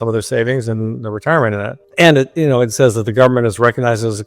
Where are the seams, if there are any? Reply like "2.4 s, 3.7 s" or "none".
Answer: 1.8 s